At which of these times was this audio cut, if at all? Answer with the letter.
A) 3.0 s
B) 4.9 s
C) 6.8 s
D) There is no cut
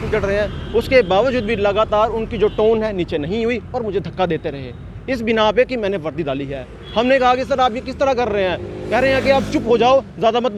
D